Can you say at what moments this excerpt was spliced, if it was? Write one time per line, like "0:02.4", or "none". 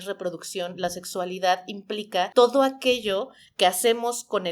0:02.3